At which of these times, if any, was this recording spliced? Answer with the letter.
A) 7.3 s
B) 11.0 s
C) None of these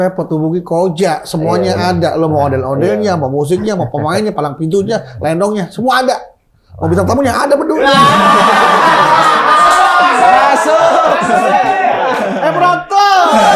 C